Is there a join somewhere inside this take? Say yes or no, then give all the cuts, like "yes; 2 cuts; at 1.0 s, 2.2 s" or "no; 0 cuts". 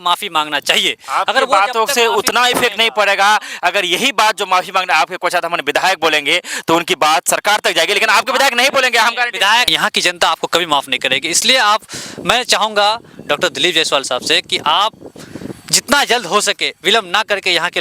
yes; 1 cut; at 9.7 s